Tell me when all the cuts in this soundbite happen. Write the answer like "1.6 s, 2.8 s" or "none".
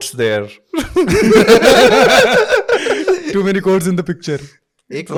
none